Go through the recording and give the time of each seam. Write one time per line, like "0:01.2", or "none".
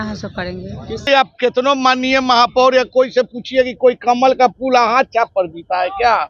0:01.1

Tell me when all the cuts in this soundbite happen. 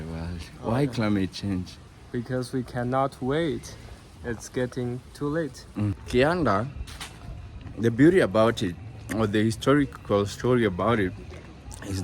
0:05.9

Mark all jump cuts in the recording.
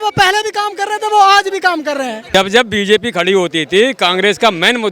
0:02.2

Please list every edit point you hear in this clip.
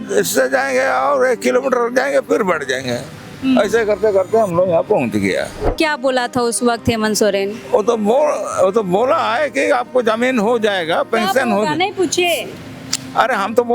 0:05.6

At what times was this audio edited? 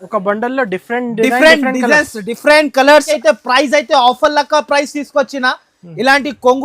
0:03.1

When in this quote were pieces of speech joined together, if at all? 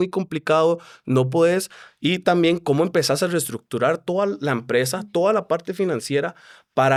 none

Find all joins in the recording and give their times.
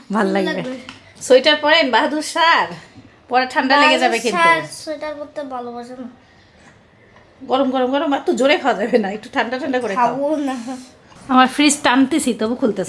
none

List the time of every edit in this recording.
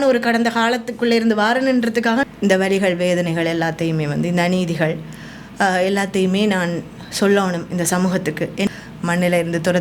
0:02.2
0:08.7

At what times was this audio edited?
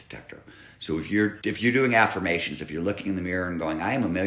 0:01.4

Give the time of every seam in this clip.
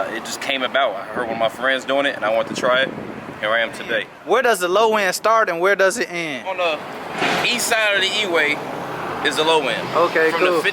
0:04.1
0:06.5

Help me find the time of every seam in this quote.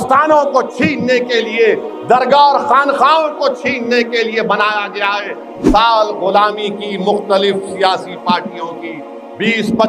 0:05.6

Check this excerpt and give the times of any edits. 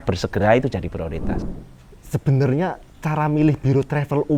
0:01.3

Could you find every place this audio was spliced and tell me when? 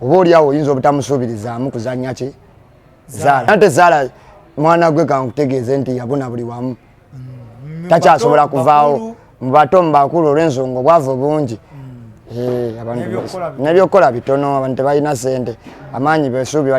0:03.5

